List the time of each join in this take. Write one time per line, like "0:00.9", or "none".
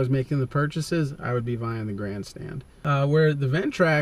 0:02.9